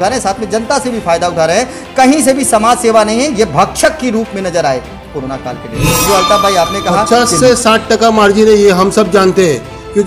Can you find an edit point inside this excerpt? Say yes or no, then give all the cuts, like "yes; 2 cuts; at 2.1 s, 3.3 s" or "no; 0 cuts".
yes; 1 cut; at 7.1 s